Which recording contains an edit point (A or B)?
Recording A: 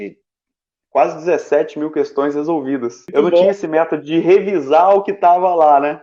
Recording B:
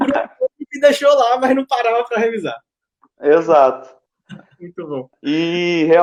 A